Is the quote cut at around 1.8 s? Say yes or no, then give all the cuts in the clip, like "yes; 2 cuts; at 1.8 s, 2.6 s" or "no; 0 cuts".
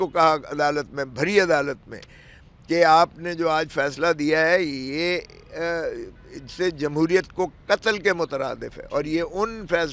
no; 0 cuts